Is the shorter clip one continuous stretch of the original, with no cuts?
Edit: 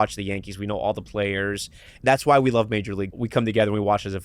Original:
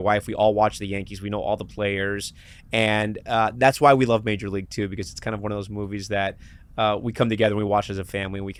no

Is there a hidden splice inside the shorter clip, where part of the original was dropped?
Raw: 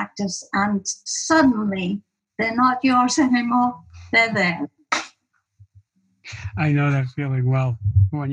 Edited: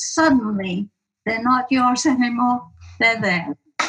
no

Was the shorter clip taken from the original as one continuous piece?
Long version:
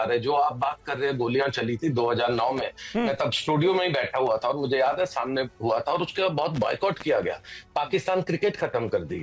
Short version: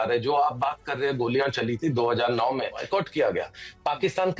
no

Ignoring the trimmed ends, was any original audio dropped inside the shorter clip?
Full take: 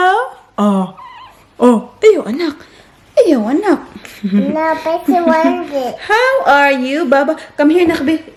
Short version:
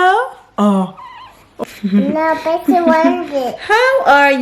yes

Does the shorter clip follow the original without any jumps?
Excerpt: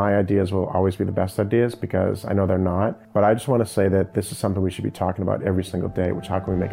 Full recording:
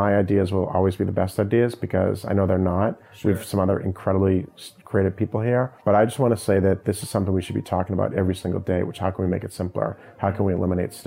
no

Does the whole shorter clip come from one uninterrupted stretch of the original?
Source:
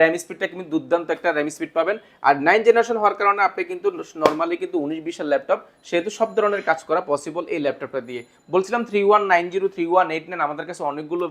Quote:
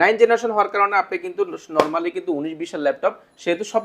yes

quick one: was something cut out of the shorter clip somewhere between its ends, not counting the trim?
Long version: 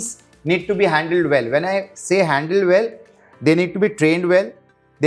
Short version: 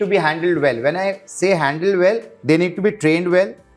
yes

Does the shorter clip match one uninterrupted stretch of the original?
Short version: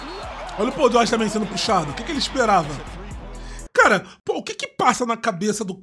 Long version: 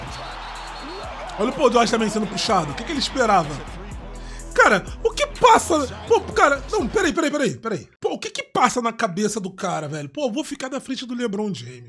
no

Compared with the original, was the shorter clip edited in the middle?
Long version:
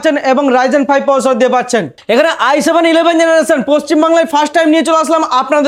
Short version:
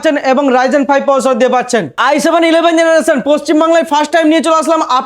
yes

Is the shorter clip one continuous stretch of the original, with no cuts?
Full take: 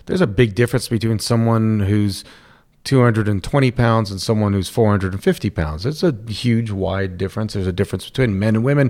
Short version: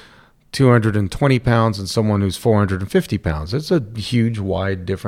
yes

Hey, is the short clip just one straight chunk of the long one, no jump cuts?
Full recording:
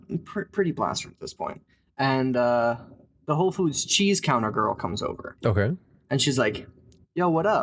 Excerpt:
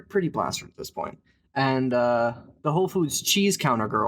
no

